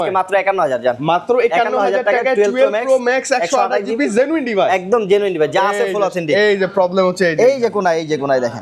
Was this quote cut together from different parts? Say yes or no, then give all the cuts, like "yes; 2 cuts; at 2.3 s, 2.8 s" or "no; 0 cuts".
no; 0 cuts